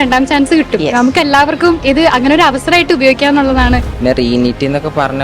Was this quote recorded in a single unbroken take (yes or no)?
no